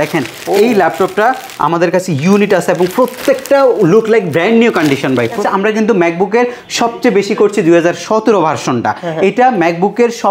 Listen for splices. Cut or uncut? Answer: cut